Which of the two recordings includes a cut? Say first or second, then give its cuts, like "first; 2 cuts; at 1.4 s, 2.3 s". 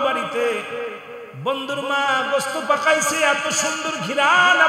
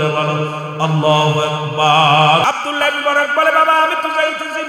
second; 1 cut; at 2.4 s